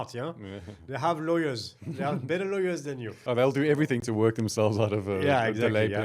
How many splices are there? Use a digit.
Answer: 1